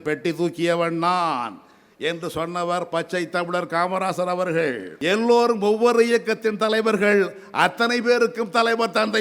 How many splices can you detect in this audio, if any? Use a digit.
1